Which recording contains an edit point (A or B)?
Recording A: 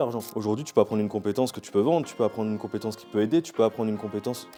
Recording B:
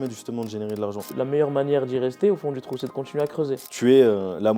B